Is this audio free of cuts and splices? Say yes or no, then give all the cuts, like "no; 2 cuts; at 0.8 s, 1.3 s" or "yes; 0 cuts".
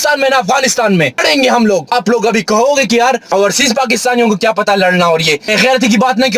no; 4 cuts; at 1.2 s, 1.9 s, 3.2 s, 5.5 s